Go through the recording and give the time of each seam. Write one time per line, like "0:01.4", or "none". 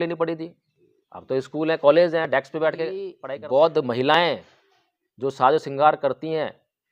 0:03.2